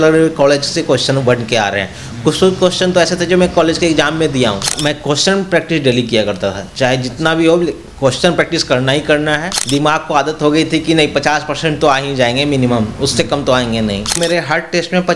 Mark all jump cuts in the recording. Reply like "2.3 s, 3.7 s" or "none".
4.8 s, 9.5 s, 14.1 s

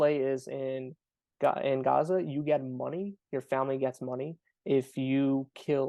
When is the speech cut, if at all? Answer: none

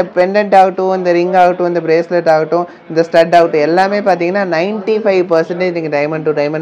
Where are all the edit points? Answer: none

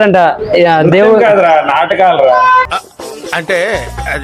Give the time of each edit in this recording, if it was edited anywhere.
none

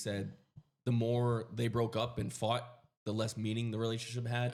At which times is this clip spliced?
none

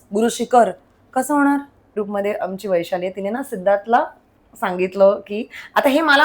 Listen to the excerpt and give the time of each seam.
2.0 s

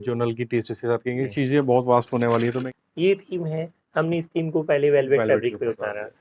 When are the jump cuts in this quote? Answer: 1.3 s, 2.7 s

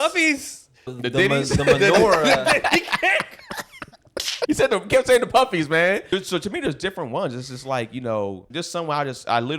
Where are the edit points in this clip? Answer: 1.0 s, 4.5 s, 6.1 s, 8.4 s

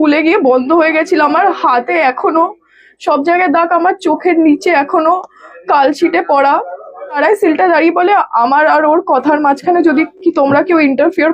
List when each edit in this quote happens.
7.2 s

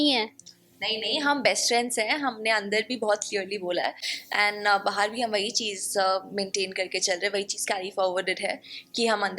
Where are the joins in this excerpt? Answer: none

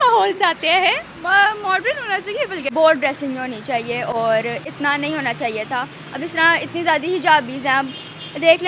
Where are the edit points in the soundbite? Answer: 2.7 s

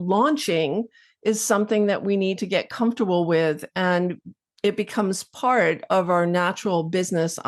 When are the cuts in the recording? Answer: none

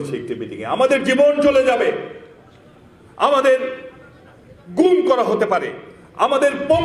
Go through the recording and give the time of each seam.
none

